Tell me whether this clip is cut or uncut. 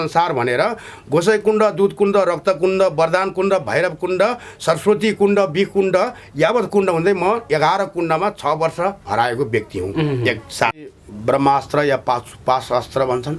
cut